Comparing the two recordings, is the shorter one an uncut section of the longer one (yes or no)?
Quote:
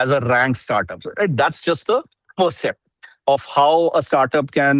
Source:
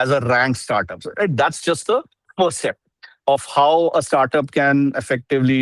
yes